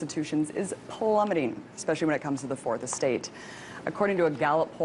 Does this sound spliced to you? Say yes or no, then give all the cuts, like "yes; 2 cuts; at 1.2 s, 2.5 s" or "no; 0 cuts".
yes; 1 cut; at 3.5 s